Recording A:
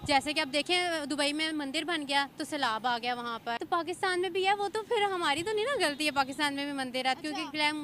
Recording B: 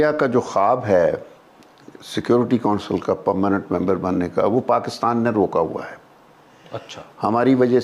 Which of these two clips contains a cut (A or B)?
A